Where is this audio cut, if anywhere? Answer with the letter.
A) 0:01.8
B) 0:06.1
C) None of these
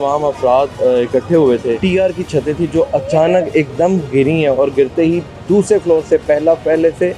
A